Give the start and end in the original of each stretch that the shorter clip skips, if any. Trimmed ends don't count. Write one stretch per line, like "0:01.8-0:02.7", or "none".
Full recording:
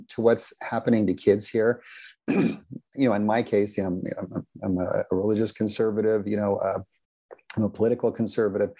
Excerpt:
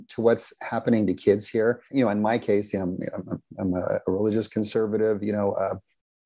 0:01.8-0:02.9